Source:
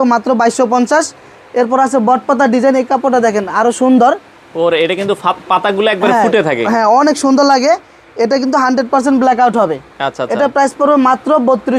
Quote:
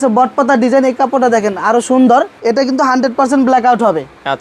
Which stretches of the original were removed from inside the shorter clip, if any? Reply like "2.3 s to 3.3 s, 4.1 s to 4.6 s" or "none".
4.2 s to 8.1 s